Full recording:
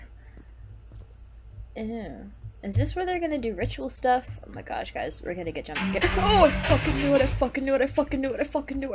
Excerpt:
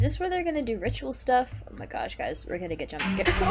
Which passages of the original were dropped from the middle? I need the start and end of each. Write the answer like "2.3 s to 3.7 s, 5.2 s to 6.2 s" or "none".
none